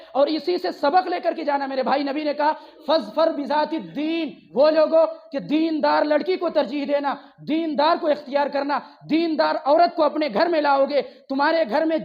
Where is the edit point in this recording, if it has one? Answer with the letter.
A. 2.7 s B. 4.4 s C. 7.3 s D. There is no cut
B